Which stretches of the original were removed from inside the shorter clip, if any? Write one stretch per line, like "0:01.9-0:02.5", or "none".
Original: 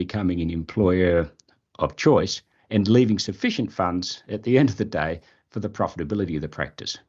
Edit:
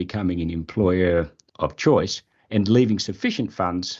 0:01.4-0:01.6